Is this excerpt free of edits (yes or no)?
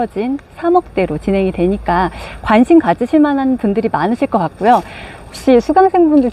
yes